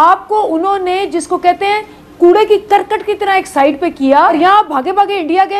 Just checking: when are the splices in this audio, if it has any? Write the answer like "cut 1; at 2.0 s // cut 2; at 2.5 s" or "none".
cut 1; at 4.3 s